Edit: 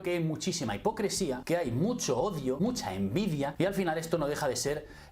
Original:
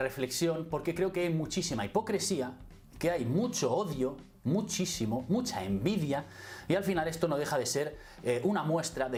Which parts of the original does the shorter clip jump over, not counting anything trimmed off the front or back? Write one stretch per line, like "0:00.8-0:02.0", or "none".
0:02.5-0:02.9
0:04.1-0:05.3
0:06.2-0:06.6